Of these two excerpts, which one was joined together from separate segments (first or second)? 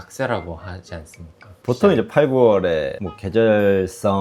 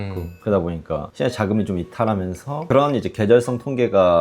second